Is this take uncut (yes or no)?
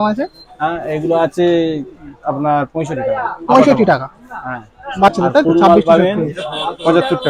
yes